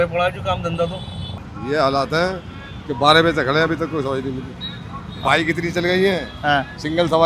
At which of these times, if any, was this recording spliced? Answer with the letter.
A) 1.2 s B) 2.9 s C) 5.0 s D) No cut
A